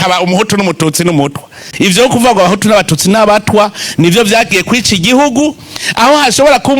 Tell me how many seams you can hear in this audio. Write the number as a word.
one